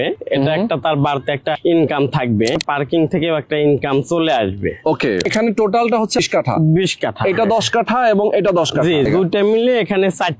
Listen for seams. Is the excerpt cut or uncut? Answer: cut